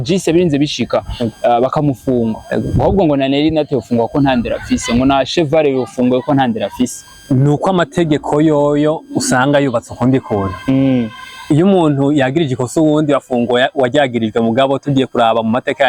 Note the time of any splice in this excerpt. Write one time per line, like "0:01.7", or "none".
0:07.1